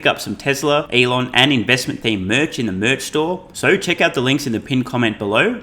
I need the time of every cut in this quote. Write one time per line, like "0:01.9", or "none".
0:00.9
0:03.5